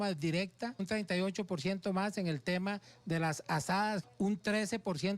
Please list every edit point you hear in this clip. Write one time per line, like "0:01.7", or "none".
0:00.8
0:04.0